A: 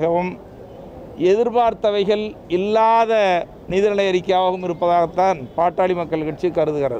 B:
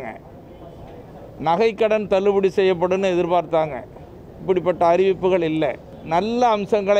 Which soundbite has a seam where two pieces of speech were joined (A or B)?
B